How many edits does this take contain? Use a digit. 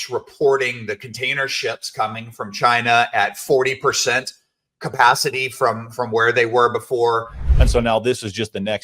1